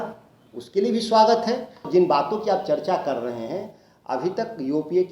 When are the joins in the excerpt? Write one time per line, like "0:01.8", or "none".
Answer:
0:01.8